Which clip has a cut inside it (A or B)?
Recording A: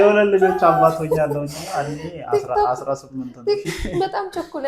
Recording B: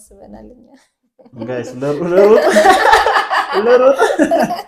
A